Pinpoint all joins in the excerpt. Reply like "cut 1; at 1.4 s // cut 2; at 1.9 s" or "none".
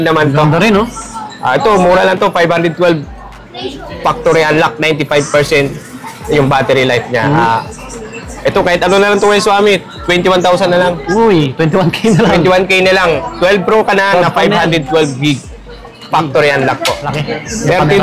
cut 1; at 17.1 s